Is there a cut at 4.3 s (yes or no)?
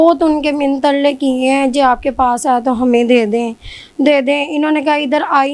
no